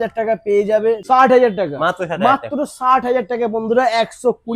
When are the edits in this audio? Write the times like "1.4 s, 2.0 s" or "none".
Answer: 1.0 s